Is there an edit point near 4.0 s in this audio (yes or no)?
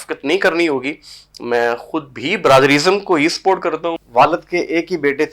yes